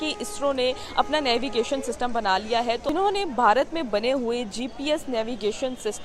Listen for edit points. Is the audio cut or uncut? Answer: cut